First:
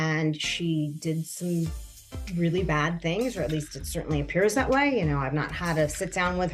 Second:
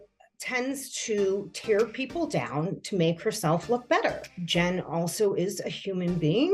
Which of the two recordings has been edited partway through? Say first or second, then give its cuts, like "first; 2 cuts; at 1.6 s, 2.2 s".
second; 1 cut; at 4.3 s